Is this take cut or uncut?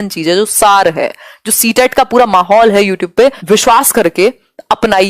cut